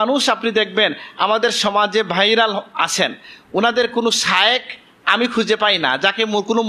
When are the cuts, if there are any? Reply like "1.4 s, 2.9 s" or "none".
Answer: none